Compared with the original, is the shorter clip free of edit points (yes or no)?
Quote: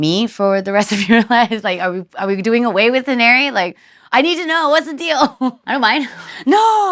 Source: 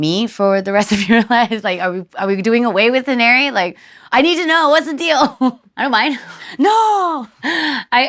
no